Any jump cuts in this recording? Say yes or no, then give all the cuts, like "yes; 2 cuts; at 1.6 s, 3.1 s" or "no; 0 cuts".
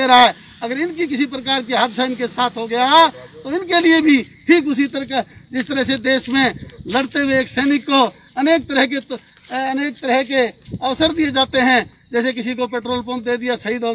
no; 0 cuts